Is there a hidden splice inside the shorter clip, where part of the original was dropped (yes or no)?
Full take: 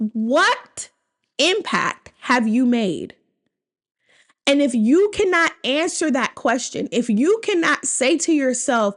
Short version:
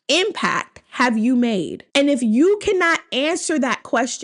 yes